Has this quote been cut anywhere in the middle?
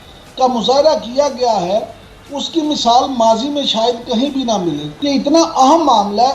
yes; 1 cut; at 4.9 s

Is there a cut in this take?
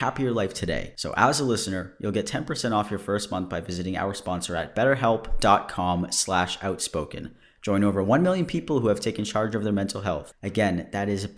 no; 0 cuts

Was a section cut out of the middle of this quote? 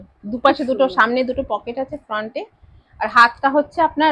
no; 0 cuts

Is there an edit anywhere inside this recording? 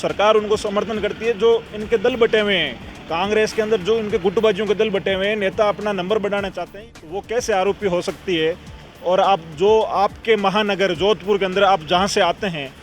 yes; 1 cut; at 6.7 s

